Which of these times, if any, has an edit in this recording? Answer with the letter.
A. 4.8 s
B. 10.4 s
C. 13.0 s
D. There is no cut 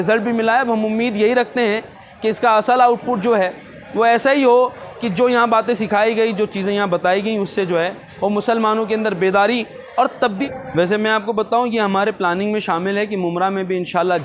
B